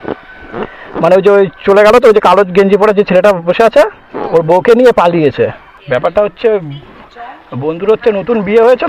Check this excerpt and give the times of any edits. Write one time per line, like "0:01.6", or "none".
0:05.7